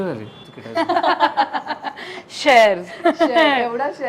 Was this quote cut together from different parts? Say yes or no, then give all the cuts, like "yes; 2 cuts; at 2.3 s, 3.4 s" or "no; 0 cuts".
no; 0 cuts